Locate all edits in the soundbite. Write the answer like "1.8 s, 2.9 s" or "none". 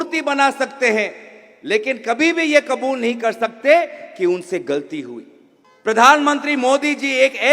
5.7 s